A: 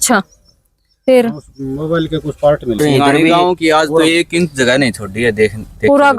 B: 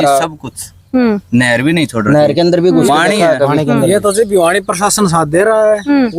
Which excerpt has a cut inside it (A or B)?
A